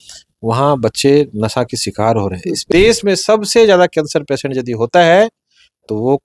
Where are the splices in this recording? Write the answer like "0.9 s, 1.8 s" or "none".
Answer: 2.7 s